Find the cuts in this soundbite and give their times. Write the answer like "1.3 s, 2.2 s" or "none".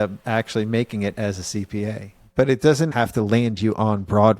2.2 s, 2.9 s